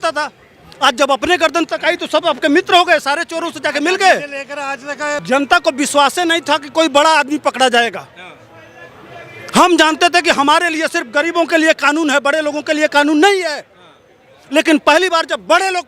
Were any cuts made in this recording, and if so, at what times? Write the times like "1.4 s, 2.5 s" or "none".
5.2 s